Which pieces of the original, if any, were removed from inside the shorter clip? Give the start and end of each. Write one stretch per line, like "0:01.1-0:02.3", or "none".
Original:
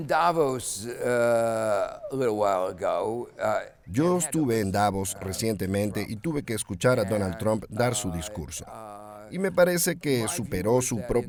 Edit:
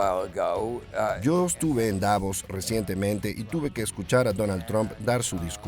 0:03.6-0:03.9